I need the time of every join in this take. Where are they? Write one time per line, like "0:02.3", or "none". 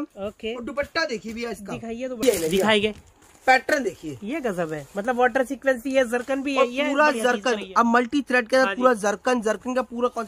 0:02.2